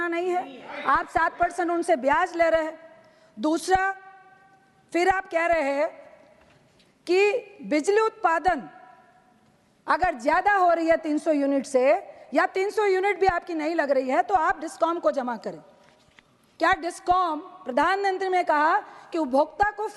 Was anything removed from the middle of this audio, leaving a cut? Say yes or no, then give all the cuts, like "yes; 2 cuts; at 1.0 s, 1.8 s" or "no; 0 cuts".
no; 0 cuts